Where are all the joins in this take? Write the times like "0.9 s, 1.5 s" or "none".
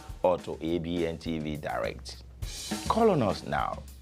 1.1 s